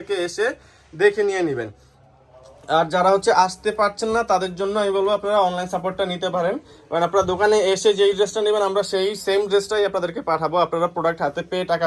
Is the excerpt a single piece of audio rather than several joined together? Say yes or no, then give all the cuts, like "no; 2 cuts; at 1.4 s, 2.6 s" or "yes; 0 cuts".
yes; 0 cuts